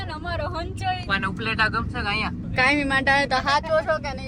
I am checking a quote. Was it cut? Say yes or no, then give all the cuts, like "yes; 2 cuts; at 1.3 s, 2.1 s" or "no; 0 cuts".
yes; 2 cuts; at 1.1 s, 2.5 s